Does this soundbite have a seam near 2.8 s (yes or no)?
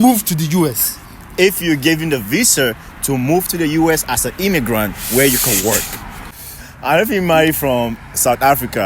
no